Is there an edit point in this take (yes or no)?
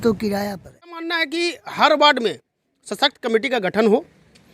yes